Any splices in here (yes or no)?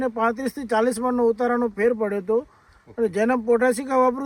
no